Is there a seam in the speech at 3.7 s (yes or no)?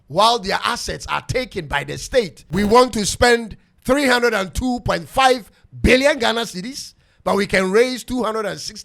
no